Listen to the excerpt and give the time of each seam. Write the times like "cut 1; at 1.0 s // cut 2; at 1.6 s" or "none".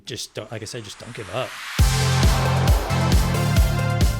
cut 1; at 1.6 s